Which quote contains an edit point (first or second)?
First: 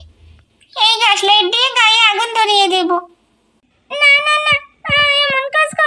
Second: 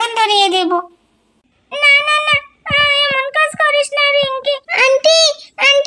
second